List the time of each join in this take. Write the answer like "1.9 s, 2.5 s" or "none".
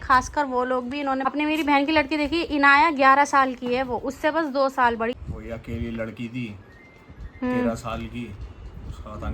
1.3 s, 5.2 s

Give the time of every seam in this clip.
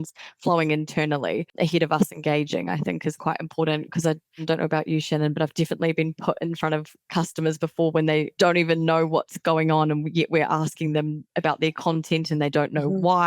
1.5 s, 4.4 s, 8.3 s

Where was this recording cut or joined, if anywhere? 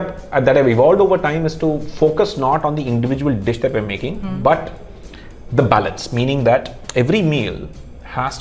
none

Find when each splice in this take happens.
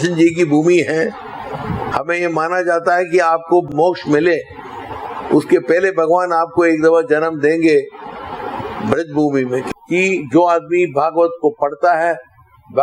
1.9 s, 3.7 s, 9.7 s

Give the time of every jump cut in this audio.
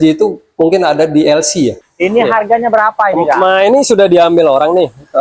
1.8 s

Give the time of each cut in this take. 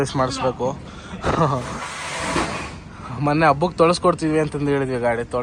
none

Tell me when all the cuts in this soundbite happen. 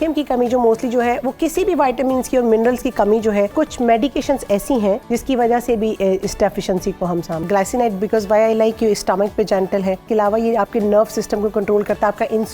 3.5 s, 5.0 s, 7.4 s, 10.1 s

